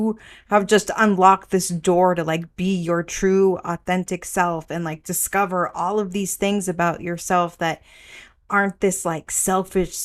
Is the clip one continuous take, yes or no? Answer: yes